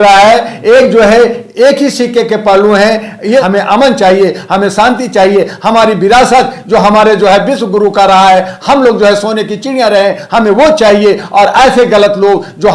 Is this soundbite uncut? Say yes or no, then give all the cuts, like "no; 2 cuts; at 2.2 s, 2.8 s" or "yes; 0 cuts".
no; 1 cut; at 3.4 s